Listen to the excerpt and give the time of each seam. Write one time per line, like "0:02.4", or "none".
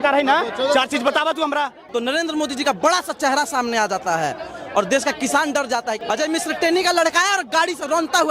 0:01.8
0:06.0